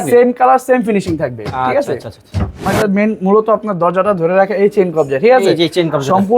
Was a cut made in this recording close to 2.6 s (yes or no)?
yes